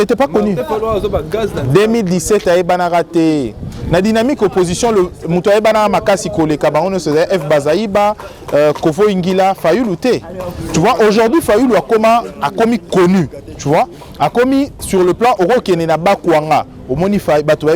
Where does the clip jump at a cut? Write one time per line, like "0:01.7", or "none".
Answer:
none

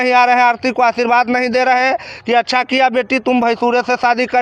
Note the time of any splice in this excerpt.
none

